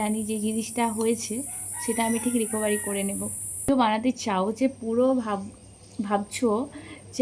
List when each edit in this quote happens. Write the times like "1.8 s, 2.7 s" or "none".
3.7 s